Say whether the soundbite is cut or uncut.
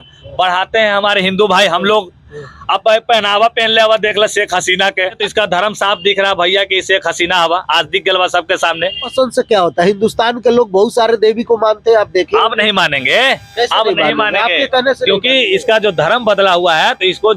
cut